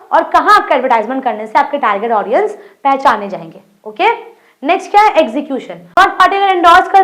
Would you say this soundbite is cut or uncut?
cut